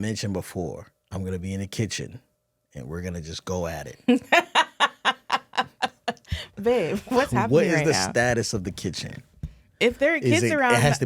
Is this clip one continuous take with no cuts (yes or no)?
no